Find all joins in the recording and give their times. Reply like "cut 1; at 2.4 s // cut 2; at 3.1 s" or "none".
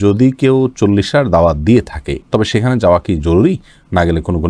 none